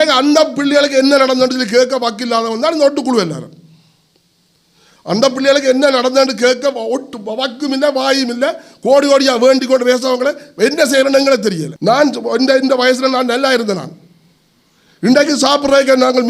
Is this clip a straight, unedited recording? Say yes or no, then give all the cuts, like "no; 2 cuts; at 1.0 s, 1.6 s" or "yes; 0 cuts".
no; 1 cut; at 11.7 s